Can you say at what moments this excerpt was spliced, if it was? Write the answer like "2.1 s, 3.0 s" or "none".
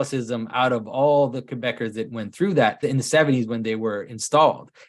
2.8 s